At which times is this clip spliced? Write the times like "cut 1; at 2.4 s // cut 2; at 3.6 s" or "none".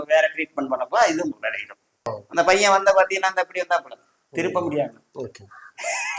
cut 1; at 2.2 s